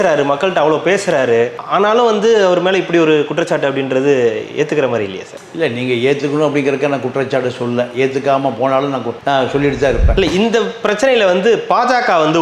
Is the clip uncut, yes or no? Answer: no